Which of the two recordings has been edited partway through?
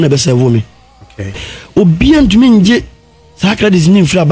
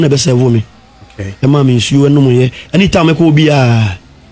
first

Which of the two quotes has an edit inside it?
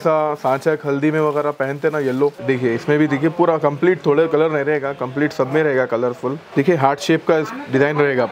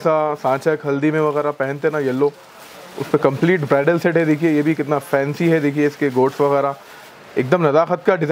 first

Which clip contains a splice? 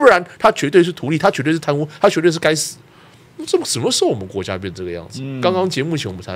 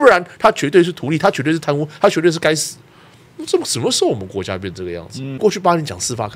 second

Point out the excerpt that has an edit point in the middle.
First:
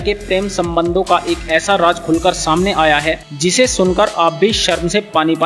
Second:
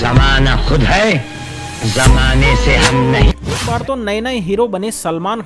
second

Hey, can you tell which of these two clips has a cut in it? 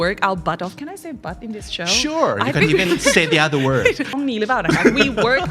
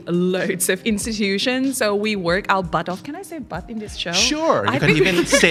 first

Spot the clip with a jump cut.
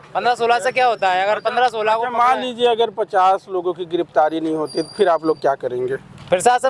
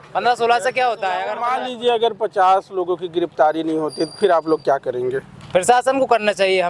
second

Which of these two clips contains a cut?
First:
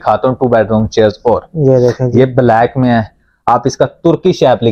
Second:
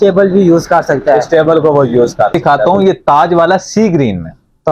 second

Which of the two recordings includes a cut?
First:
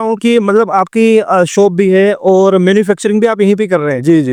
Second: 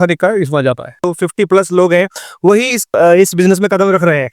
second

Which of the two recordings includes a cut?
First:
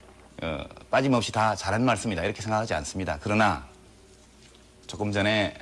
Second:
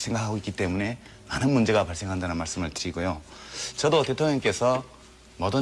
second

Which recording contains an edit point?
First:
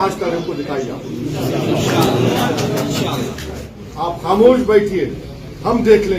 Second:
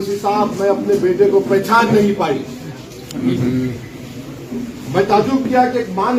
first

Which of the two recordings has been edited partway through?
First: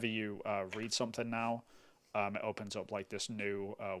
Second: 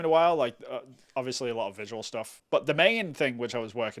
second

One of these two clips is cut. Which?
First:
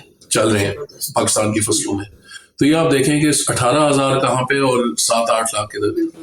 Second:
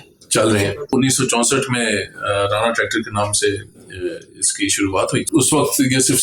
second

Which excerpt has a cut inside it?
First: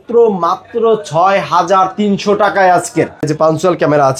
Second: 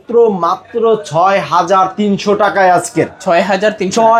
first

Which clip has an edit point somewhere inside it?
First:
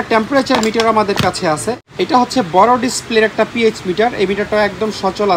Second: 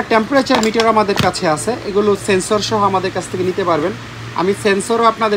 first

